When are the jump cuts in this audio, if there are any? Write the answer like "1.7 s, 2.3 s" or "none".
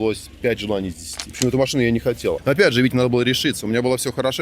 1.3 s, 2.4 s